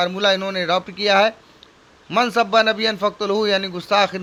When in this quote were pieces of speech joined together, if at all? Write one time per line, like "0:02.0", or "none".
none